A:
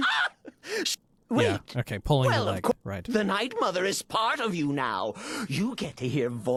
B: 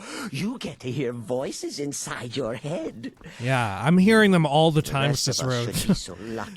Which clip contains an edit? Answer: B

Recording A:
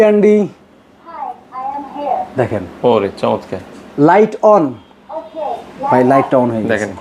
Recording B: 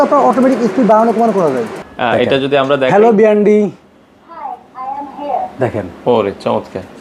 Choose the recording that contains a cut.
B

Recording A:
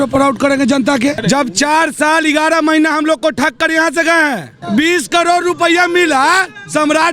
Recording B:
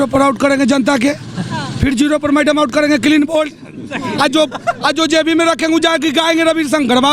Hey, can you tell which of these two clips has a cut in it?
A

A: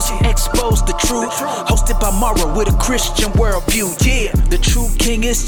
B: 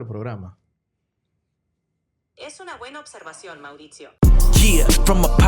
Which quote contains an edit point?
B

